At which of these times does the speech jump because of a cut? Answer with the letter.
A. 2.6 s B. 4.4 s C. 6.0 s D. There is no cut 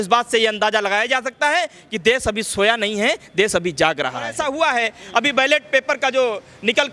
B